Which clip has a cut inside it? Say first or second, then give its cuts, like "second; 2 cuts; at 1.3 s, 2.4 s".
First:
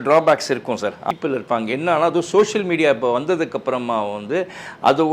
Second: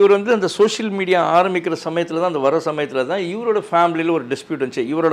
first; 1 cut; at 1.0 s